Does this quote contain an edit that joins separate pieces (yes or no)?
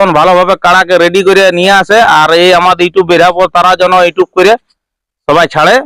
no